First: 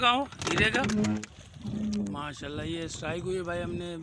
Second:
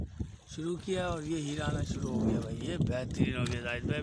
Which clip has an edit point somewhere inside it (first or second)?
first